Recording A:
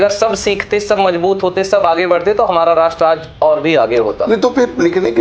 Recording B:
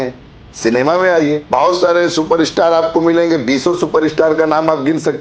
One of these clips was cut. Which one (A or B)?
B